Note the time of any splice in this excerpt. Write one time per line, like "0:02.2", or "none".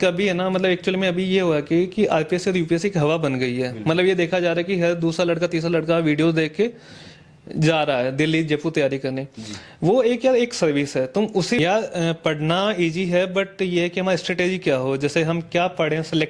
0:11.6